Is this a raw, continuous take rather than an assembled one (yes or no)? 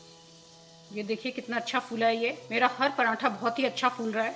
yes